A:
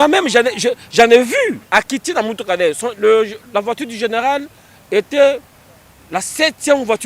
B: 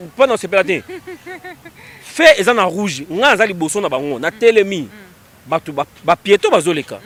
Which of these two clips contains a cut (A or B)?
A